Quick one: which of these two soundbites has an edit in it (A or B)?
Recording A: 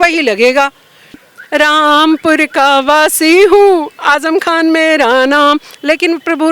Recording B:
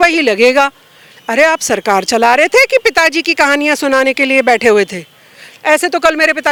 A